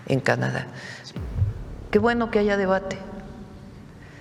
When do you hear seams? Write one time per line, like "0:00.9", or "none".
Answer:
0:01.0